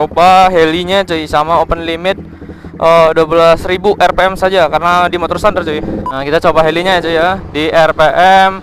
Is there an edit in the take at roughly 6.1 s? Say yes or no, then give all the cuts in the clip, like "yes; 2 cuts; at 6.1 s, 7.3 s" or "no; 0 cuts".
yes; 1 cut; at 6.1 s